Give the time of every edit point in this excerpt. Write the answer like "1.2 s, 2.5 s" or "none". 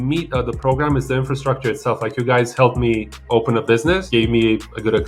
4.0 s